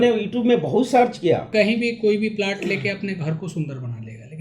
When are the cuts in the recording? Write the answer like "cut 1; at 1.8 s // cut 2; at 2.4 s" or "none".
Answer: cut 1; at 1.5 s

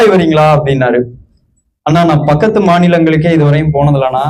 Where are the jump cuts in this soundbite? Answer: none

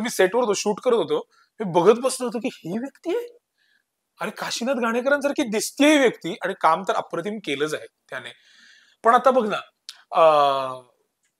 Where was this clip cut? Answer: none

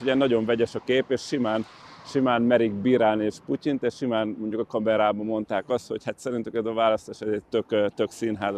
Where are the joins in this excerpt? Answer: none

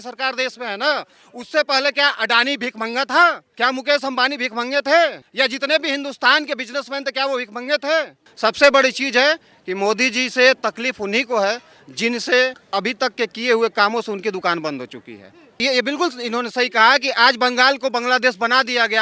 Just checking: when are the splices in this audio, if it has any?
cut 1; at 3.5 s // cut 2; at 5.2 s // cut 3; at 8.2 s // cut 4; at 12.6 s // cut 5; at 15.6 s

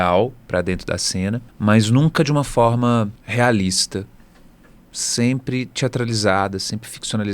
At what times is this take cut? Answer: cut 1; at 1.5 s // cut 2; at 3.2 s

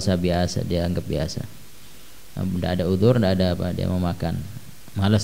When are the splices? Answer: none

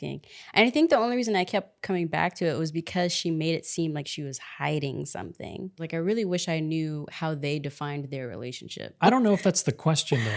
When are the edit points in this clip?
cut 1; at 5.8 s // cut 2; at 9.0 s

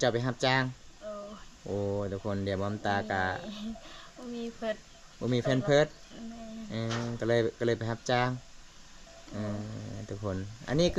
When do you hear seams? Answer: none

